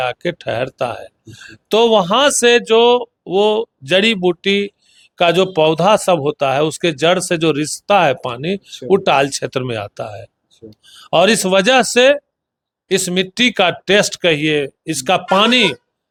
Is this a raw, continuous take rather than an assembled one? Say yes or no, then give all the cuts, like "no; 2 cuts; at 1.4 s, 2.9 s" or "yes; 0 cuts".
yes; 0 cuts